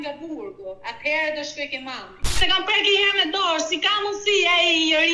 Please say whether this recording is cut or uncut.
cut